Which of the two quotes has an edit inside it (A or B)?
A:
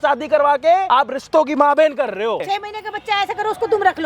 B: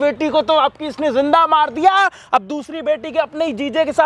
A